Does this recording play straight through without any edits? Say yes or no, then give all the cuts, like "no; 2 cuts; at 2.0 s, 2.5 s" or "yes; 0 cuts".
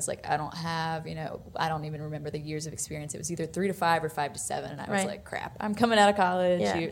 yes; 0 cuts